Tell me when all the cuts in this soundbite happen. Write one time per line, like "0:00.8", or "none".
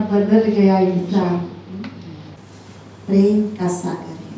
0:02.3